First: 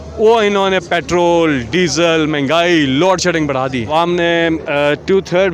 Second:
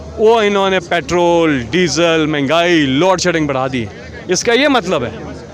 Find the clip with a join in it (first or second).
first